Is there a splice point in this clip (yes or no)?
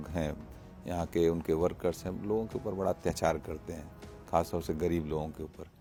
no